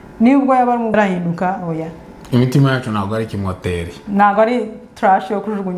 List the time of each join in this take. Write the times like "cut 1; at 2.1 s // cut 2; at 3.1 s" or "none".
cut 1; at 0.9 s